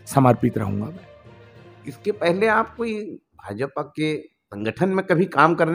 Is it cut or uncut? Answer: uncut